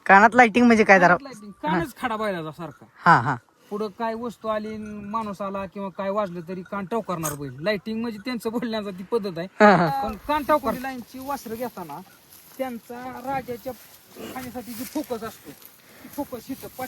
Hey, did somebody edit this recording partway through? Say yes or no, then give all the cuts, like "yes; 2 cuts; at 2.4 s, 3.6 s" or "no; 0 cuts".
yes; 1 cut; at 10.8 s